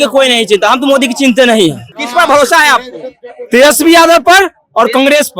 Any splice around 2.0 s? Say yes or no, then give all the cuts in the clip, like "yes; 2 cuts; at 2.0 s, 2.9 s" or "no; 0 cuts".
yes; 1 cut; at 2.0 s